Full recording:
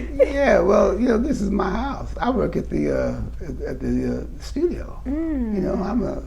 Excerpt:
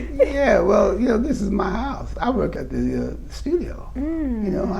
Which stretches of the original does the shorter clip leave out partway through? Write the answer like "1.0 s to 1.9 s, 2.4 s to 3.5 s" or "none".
2.5 s to 3.6 s